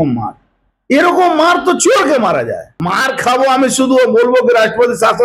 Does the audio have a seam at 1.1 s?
no; 1 cut; at 2.7 s

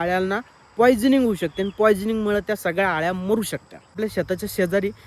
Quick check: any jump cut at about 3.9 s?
yes; 1 cut; at 3.9 s

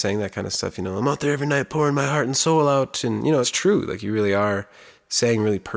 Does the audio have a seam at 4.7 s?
no; 0 cuts

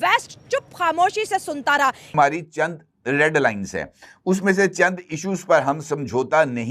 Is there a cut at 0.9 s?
no; 1 cut; at 2.1 s

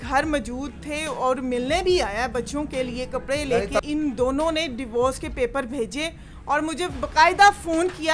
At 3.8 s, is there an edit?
yes; 1 cut; at 3.8 s

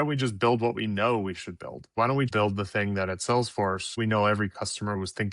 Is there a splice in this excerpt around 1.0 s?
no; 2 cuts; at 2.2 s, 4.0 s

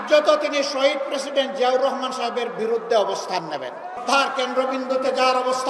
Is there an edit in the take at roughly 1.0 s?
no; 1 cut; at 4.0 s

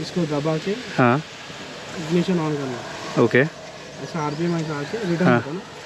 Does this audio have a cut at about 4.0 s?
no; 0 cuts

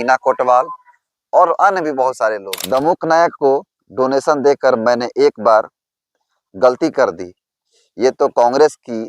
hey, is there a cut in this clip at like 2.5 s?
yes; 1 cut; at 2.5 s

